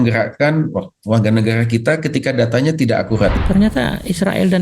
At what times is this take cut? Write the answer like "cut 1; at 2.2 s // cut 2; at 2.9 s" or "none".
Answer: cut 1; at 3.3 s